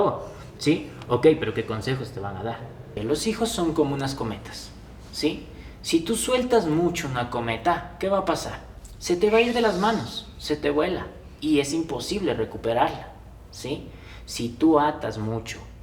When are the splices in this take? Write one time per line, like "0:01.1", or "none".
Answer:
0:02.9